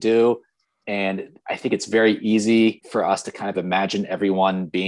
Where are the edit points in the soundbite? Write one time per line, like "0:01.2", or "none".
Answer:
0:02.8